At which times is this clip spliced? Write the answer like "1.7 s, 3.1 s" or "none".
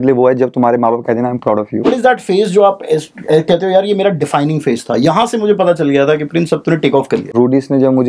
1.9 s, 7.3 s